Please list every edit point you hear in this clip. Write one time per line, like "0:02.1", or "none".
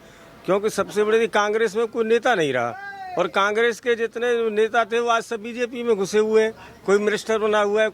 none